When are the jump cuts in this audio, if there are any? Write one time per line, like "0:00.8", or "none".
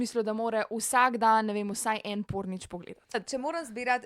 0:03.1